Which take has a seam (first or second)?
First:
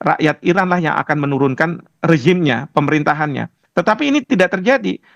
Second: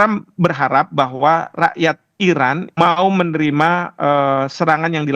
second